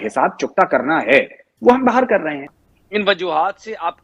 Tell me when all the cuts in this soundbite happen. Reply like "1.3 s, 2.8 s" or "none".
2.4 s

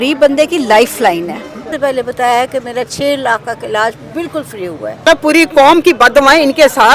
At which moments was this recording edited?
1.7 s, 5.1 s

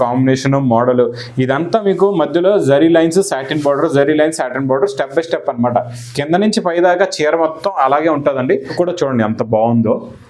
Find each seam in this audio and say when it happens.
8.7 s

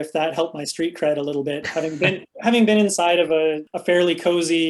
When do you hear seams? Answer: 3.7 s

